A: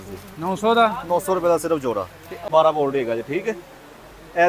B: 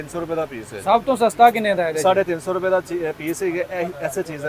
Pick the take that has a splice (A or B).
A